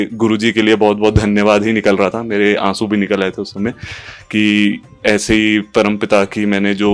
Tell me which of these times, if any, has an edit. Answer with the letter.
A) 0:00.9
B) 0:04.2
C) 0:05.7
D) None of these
D